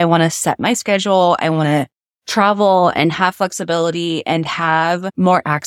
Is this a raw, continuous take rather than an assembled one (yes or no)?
yes